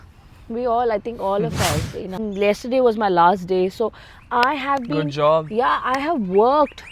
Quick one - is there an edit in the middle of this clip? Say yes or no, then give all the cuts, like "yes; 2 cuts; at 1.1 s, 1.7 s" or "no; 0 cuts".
yes; 1 cut; at 2.2 s